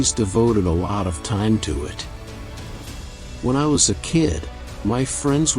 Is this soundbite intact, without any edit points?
no; 2 cuts; at 1.9 s, 3.4 s

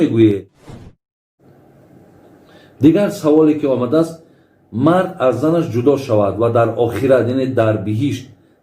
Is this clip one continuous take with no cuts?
no; 1 cut; at 1.0 s

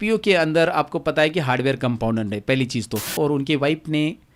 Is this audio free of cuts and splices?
no; 1 cut; at 3.1 s

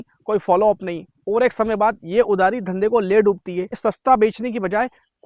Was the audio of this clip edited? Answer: yes; 1 cut; at 3.8 s

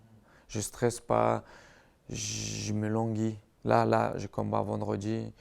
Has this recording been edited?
no; 0 cuts

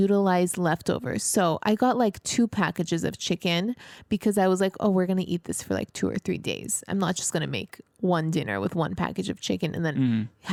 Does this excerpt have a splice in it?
no; 0 cuts

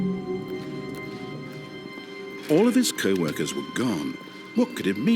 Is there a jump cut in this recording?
yes; 1 cut; at 2.5 s

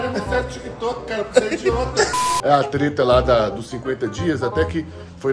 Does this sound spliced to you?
yes; 1 cut; at 2.3 s

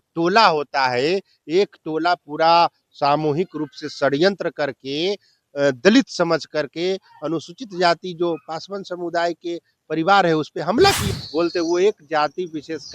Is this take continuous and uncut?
no; 1 cut; at 11.0 s

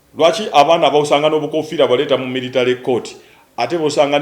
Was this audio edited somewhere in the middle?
no; 0 cuts

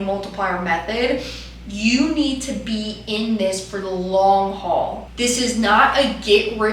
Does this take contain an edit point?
yes; 1 cut; at 5.0 s

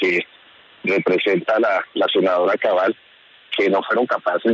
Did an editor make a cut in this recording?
no; 0 cuts

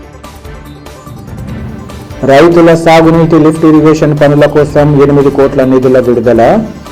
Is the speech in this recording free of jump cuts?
yes; 0 cuts

